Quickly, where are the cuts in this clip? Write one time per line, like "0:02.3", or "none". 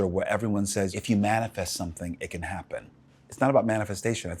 0:00.9
0:03.1

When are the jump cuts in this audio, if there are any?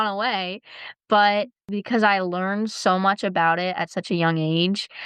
0:01.6

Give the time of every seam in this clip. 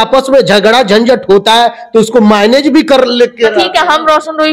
none

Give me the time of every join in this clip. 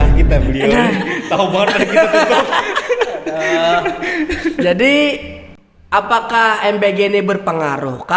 none

